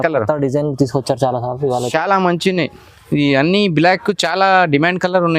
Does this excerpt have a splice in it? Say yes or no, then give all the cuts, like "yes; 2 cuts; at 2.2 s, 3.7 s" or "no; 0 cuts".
no; 0 cuts